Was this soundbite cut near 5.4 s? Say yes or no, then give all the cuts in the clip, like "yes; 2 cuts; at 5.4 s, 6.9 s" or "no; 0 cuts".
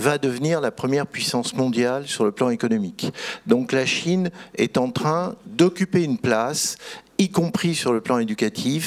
no; 0 cuts